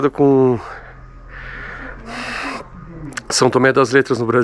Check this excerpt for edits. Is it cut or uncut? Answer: uncut